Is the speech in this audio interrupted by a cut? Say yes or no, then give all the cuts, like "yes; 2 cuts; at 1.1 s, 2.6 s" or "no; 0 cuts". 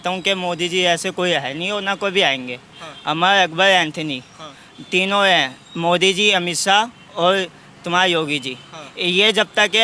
no; 0 cuts